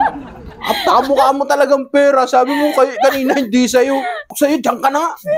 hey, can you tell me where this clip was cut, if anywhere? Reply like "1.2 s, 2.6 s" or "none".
4.3 s